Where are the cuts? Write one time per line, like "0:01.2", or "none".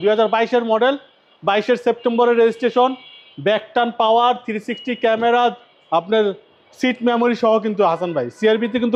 none